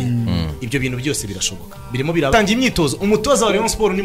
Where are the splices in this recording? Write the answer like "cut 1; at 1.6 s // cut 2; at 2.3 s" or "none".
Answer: cut 1; at 2.3 s